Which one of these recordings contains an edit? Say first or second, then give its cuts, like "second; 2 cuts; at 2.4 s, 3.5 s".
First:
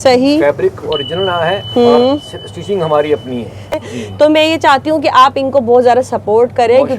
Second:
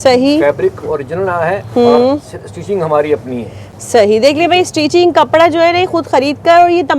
first; 1 cut; at 3.8 s